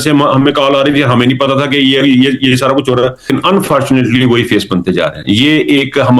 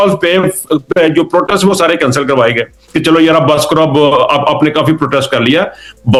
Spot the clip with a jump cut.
first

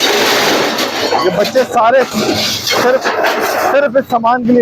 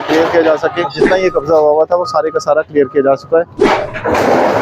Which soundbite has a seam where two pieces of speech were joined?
second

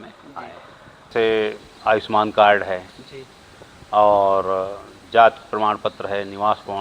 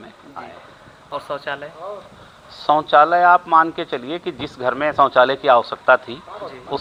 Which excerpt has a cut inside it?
first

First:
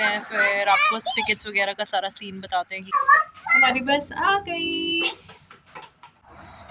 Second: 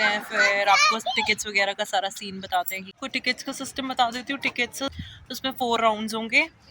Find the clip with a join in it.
second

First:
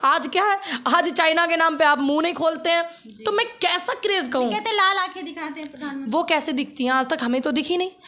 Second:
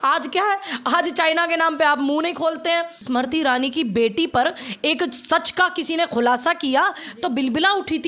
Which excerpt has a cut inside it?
second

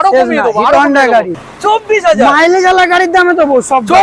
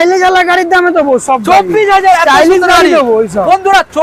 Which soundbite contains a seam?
first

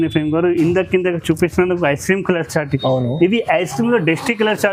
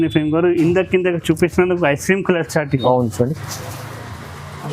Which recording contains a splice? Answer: second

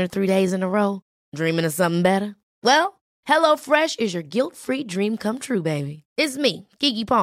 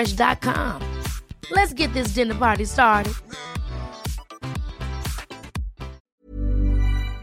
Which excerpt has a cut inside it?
second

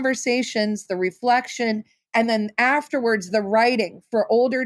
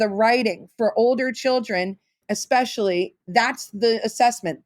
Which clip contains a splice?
second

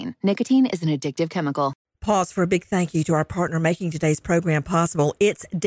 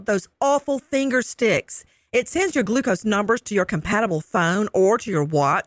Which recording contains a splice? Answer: first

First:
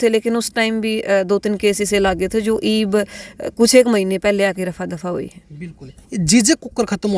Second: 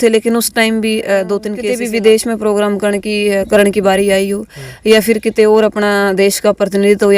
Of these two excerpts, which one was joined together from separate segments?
second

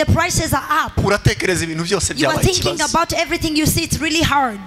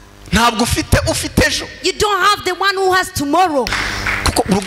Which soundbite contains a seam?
second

